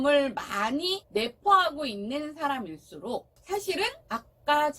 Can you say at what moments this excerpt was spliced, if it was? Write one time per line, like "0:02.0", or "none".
0:01.0
0:03.3
0:04.0